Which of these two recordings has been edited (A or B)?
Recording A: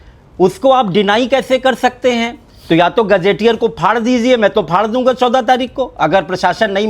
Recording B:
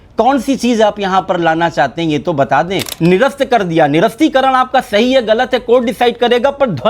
B